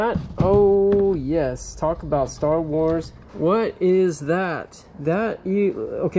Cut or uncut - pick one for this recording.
cut